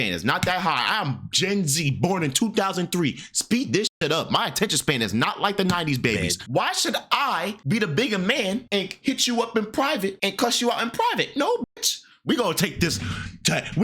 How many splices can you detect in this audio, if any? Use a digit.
4